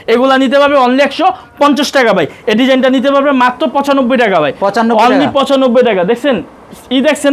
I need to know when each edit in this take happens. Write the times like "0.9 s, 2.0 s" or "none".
2.4 s